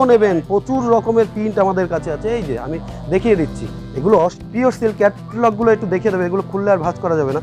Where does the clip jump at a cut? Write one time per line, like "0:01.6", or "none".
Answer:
0:04.4